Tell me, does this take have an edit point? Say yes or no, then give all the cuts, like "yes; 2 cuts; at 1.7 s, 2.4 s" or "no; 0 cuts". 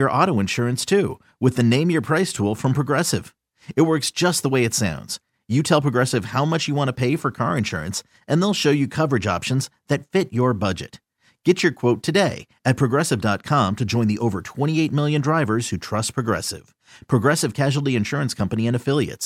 no; 0 cuts